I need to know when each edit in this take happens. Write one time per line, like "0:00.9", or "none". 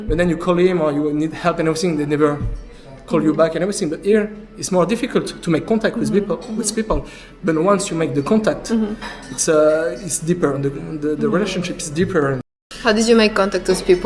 0:12.5